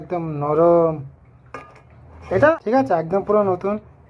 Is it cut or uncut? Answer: cut